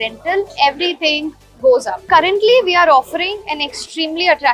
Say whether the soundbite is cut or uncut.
cut